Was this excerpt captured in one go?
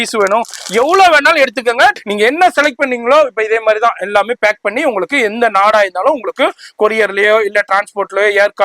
no; 1 cut; at 2.0 s

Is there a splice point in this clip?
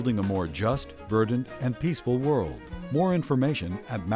no; 0 cuts

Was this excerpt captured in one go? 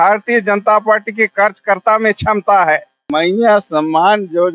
no; 1 cut; at 3.0 s

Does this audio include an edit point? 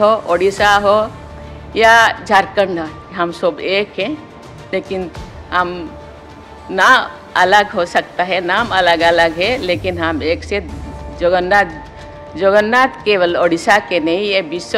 no; 0 cuts

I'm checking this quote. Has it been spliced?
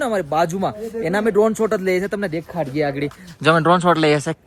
no; 0 cuts

